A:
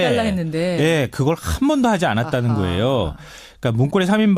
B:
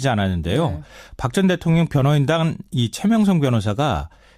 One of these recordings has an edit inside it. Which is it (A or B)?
B